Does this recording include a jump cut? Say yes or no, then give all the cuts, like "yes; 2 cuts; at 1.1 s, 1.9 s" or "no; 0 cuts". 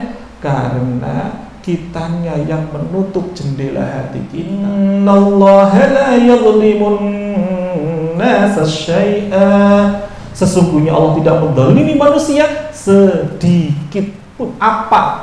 yes; 2 cuts; at 4.6 s, 14.2 s